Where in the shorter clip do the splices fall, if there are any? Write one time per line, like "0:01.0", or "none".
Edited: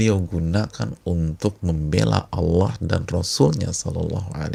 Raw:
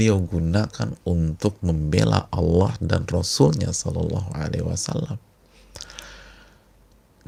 none